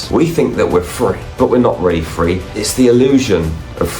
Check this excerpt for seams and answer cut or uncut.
cut